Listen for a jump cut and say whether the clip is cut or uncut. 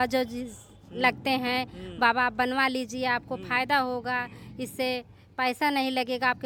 uncut